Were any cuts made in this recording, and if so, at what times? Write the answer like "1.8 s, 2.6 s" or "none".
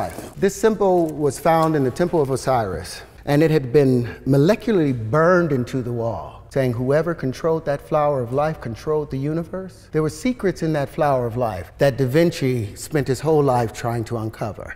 none